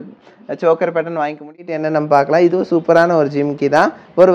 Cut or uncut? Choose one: cut